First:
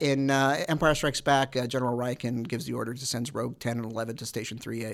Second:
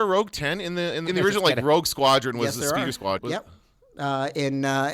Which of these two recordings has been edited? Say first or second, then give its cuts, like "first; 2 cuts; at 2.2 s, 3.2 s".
second; 2 cuts; at 1.1 s, 3.2 s